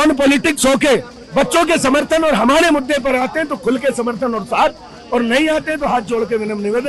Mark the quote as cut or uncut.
uncut